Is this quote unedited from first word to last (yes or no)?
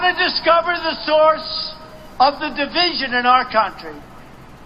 yes